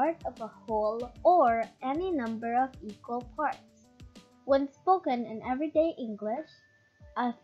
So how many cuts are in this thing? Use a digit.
0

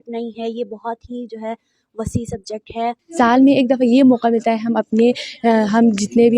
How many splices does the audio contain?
1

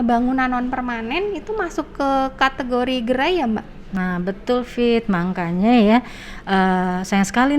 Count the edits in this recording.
1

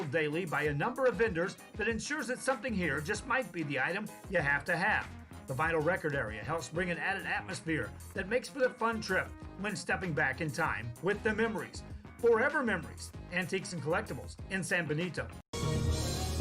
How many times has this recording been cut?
1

